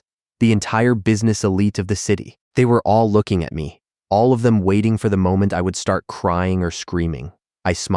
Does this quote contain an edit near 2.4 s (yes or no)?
yes